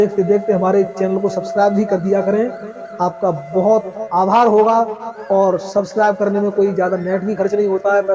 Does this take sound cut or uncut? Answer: uncut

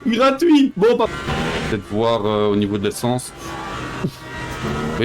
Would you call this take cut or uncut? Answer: cut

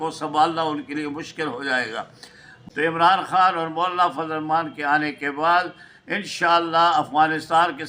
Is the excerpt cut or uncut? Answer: cut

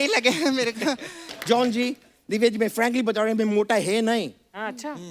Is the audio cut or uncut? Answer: cut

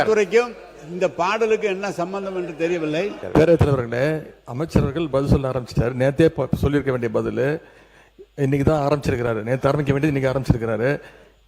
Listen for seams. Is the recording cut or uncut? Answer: cut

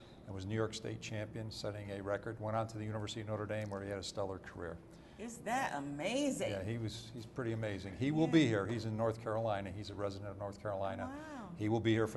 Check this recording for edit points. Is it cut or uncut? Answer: cut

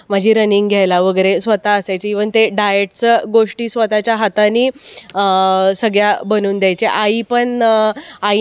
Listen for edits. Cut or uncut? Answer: uncut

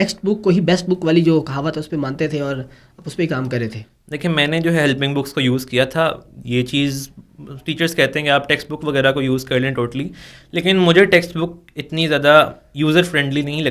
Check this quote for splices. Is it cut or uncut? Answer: uncut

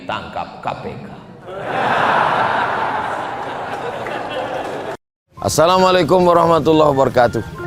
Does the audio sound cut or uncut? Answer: cut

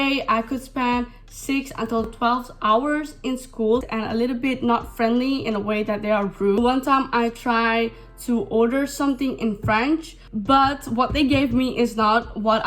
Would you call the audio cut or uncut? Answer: cut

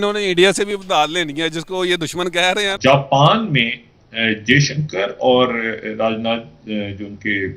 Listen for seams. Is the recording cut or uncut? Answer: cut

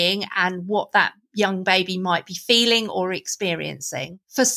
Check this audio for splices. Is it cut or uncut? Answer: uncut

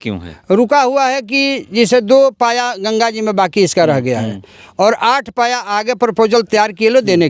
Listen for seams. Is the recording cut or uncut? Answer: uncut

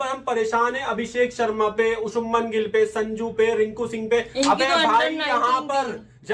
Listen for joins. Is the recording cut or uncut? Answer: uncut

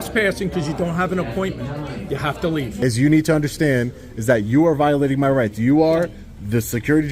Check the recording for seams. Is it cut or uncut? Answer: cut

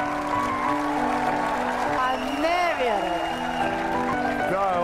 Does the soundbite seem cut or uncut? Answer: cut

